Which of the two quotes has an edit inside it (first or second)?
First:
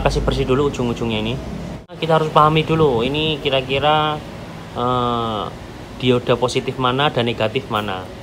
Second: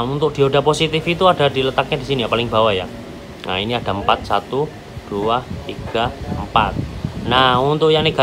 first